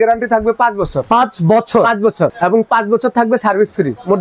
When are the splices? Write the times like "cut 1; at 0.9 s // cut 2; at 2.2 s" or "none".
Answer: cut 1; at 1.0 s // cut 2; at 2.3 s